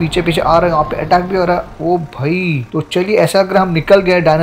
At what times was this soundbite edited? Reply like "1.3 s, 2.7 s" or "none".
none